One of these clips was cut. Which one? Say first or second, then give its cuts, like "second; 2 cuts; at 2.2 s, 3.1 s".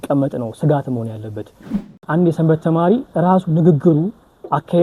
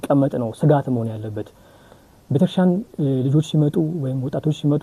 first; 1 cut; at 1.9 s